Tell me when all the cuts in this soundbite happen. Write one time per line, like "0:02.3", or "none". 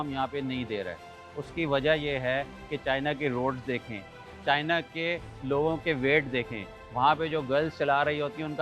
none

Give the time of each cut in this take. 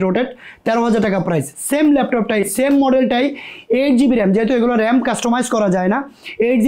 none

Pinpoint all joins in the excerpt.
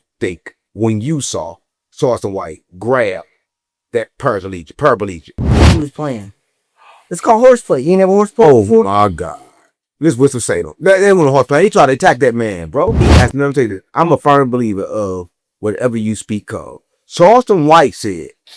0:05.4
0:13.1

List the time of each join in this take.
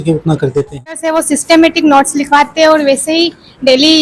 0:01.0

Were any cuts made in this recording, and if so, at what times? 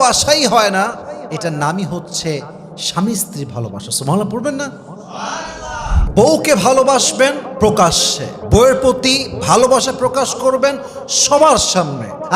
0:06.0

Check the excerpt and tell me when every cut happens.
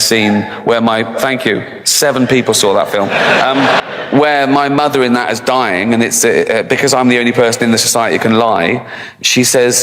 0:03.8

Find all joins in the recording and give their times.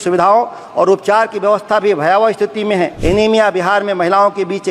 0:03.0

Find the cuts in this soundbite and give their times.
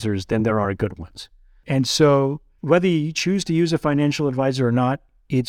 0:02.5

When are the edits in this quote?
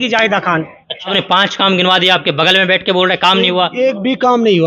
0:01.1

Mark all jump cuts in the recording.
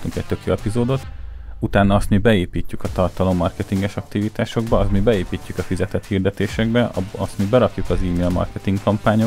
none

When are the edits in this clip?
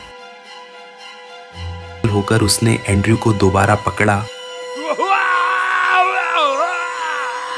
0:02.0

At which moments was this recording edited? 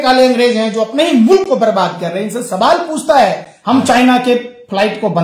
0:03.5

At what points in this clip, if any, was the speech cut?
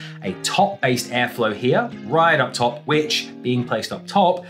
0:02.8

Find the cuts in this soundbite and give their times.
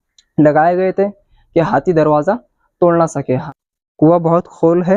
0:03.4

